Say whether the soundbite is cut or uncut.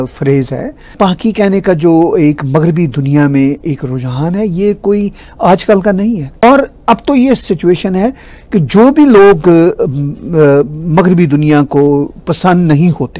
uncut